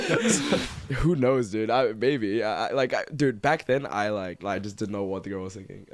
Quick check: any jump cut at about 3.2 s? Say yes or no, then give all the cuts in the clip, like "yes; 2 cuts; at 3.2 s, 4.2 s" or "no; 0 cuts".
no; 2 cuts; at 0.8 s, 4.4 s